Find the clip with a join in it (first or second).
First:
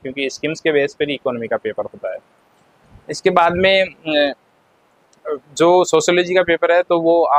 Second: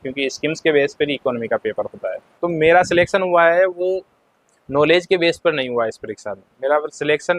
second